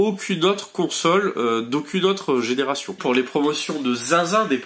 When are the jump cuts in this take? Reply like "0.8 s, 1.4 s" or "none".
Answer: 3.0 s

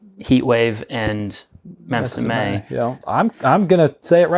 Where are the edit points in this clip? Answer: 3.0 s

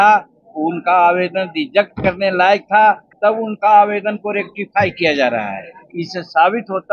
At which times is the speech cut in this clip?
3.1 s

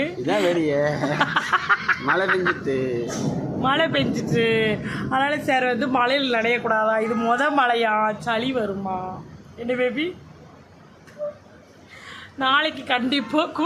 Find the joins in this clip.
none

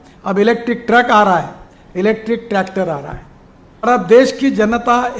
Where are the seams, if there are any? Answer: 3.9 s

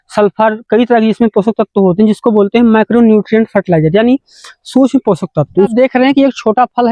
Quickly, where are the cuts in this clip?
5.7 s

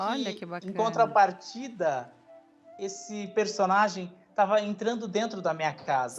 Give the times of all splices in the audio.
none

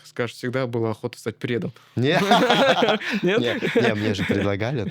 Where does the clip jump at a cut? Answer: none

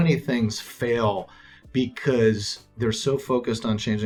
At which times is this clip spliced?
none

